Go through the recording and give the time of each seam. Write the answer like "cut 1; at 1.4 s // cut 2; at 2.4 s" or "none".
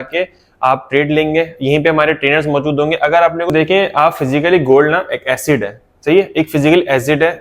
cut 1; at 3.5 s